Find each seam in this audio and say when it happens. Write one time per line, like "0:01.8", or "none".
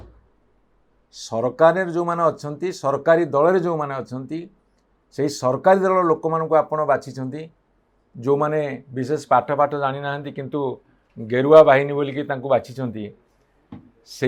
none